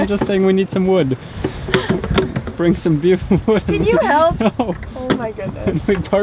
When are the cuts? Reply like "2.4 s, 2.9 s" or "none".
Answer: none